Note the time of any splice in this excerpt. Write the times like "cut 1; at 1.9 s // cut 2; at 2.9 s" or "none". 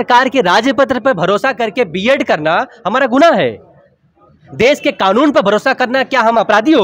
none